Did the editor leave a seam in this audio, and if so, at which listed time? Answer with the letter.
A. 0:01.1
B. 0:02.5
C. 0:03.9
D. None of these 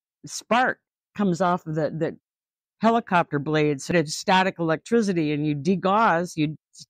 C